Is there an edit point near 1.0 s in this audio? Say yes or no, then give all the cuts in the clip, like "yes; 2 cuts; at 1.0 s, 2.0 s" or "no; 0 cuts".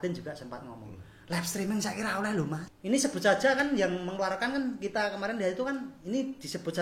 no; 1 cut; at 2.7 s